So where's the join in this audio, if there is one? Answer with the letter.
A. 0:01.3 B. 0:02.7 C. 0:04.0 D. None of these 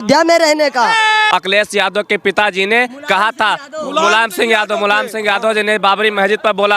A